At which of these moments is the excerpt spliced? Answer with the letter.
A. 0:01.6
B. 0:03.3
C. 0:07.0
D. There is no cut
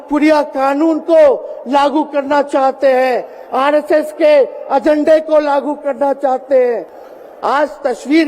C